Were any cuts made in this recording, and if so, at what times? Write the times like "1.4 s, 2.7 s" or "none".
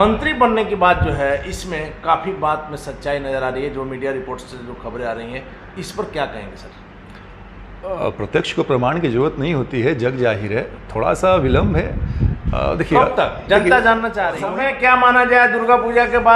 14.4 s